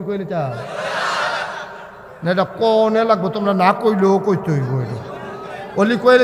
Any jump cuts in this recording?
no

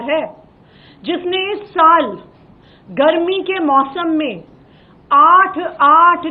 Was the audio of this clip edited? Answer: no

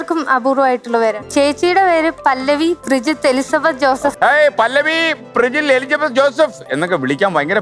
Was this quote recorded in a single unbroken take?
no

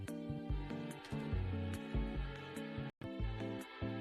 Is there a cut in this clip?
yes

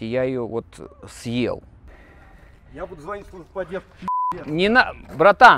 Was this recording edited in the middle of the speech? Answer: no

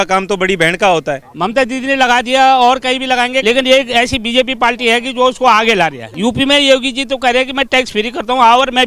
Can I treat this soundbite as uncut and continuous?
no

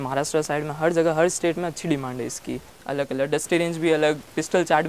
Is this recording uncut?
no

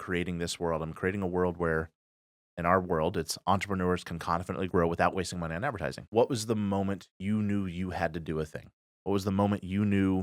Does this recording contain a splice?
yes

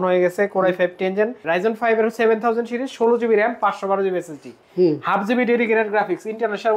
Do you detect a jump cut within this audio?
yes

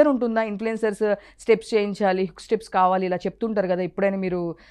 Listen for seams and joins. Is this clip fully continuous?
yes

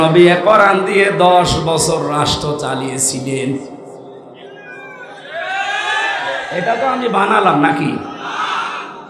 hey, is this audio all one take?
yes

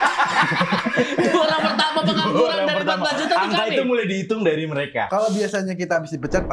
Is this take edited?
yes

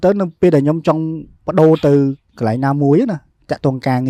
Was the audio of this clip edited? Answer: no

